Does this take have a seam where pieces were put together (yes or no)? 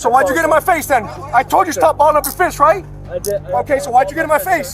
yes